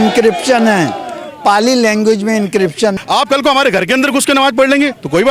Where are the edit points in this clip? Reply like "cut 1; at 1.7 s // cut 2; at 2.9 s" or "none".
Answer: cut 1; at 3.0 s